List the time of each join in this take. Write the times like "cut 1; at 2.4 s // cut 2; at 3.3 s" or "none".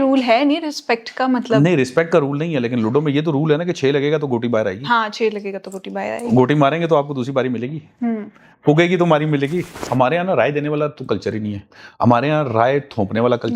cut 1; at 9.7 s